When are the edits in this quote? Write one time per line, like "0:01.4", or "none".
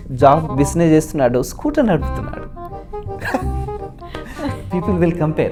none